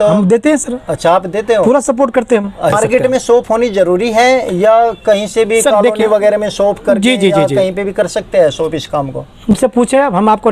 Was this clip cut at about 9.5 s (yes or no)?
yes